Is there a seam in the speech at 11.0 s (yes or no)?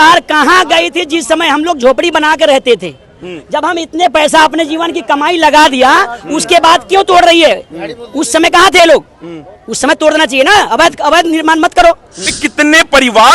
no